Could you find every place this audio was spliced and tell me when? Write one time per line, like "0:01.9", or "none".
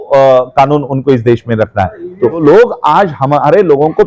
0:02.4